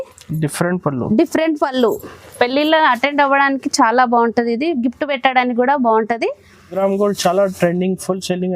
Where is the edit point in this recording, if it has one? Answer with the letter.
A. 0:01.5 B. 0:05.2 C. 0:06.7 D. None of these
C